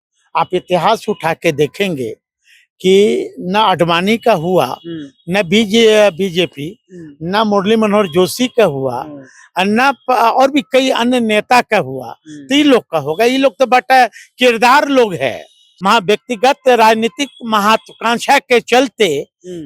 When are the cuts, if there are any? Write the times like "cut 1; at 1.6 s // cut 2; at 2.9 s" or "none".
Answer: cut 1; at 15.6 s